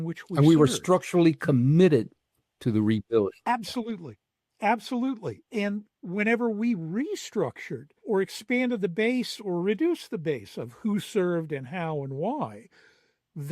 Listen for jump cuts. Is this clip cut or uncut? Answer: cut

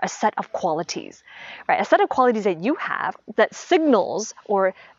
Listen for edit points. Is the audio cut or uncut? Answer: cut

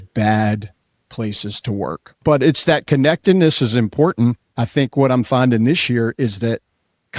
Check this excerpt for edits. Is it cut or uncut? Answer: cut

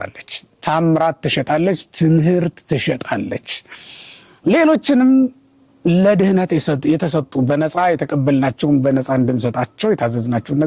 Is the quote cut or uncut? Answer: uncut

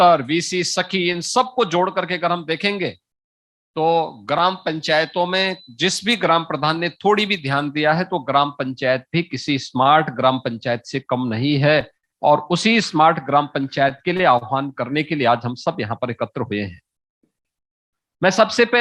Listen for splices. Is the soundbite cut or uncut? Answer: uncut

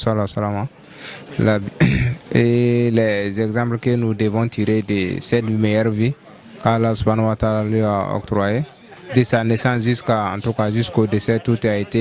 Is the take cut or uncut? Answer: uncut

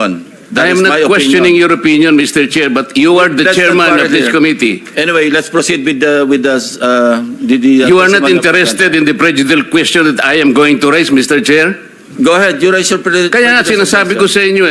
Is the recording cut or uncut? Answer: uncut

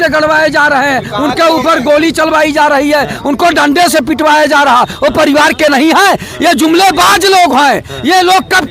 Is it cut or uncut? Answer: uncut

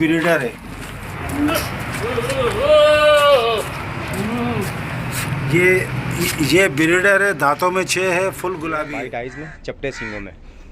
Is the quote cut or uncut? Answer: cut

